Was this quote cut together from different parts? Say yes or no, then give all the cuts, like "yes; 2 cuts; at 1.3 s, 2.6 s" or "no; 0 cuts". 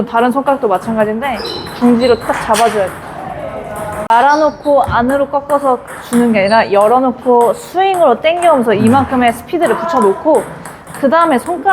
yes; 1 cut; at 4.1 s